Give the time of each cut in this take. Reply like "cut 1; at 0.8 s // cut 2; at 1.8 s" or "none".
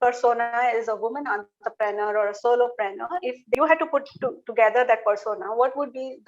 cut 1; at 3.6 s